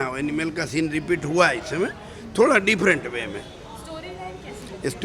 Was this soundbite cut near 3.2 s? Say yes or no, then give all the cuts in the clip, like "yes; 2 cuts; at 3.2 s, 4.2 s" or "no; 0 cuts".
no; 0 cuts